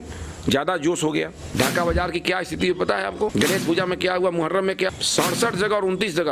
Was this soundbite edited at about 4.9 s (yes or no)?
yes